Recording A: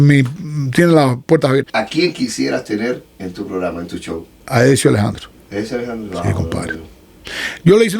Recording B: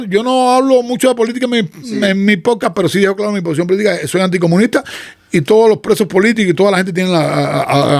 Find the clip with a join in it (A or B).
A